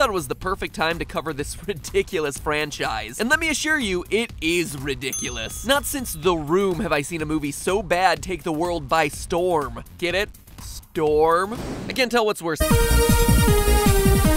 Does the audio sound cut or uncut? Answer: uncut